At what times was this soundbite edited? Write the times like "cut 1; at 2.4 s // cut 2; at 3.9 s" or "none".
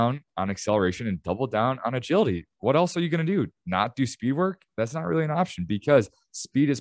none